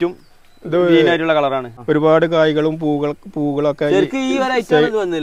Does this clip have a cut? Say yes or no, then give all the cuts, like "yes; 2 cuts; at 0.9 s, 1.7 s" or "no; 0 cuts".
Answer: yes; 1 cut; at 1.7 s